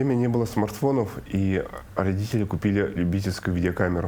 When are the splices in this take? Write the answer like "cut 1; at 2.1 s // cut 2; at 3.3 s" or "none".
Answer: none